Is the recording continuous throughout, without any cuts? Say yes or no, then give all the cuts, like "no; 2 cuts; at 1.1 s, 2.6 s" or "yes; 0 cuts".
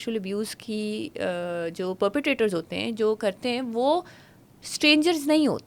yes; 0 cuts